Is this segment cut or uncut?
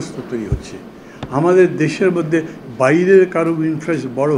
uncut